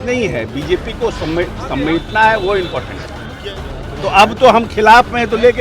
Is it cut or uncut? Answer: cut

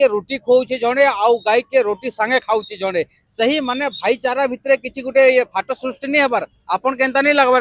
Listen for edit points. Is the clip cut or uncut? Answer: uncut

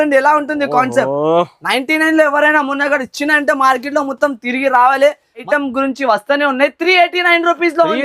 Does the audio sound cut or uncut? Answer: cut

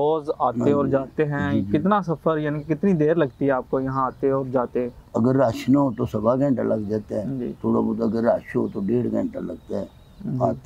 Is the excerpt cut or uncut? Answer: cut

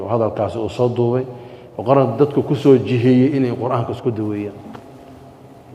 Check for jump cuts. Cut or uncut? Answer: uncut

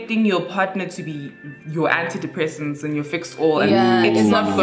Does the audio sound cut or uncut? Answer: uncut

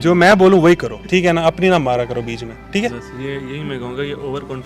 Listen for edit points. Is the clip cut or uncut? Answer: cut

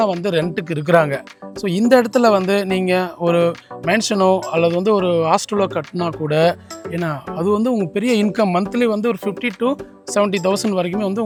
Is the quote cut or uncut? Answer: uncut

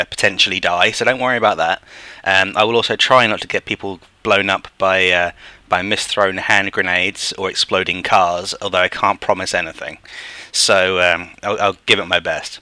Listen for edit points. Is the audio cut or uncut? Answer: cut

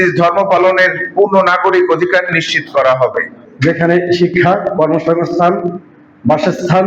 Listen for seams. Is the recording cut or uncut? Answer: cut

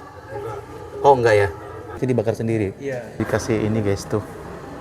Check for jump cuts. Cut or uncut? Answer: cut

